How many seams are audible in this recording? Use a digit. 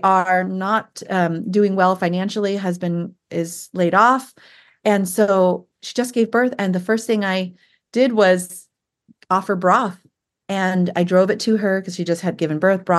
0